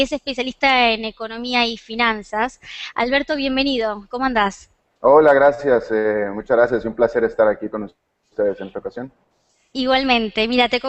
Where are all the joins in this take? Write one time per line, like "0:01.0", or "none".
0:04.9